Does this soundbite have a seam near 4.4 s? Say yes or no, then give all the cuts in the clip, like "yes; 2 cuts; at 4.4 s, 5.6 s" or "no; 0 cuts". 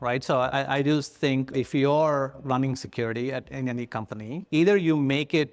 yes; 1 cut; at 4.4 s